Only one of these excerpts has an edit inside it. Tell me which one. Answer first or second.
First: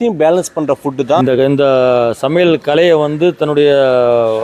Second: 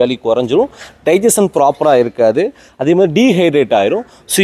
first